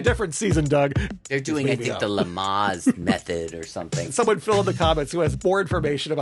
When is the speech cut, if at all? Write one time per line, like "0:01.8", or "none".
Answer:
0:01.0
0:04.1
0:05.4